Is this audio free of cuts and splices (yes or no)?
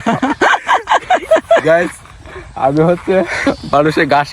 no